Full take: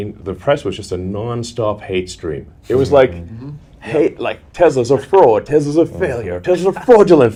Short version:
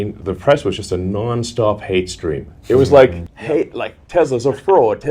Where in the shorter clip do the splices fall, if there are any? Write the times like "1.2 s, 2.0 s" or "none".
3.3 s